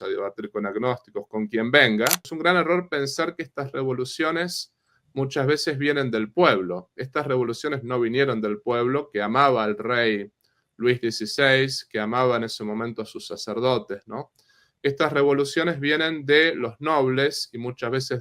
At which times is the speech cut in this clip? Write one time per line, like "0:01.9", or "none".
0:02.3

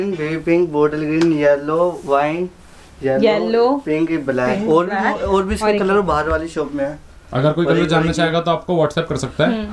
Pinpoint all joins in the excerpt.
none

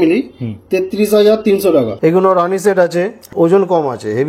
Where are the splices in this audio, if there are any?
0:01.9
0:03.2

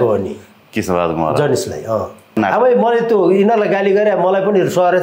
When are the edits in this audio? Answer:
0:02.4

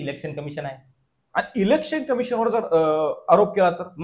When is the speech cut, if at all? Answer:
none

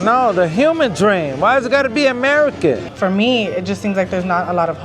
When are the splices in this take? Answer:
0:02.9

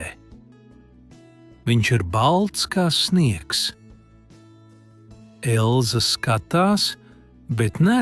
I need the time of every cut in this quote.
none

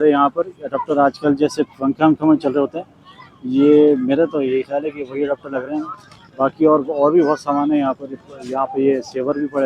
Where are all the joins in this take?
none

